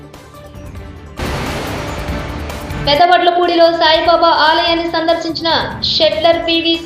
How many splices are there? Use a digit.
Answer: 2